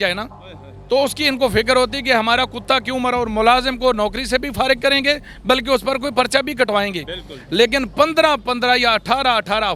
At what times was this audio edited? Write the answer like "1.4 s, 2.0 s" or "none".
none